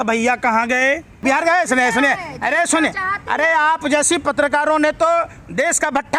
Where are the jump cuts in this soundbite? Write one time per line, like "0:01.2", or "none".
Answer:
0:01.2